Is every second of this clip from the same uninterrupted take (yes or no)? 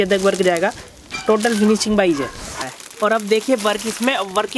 no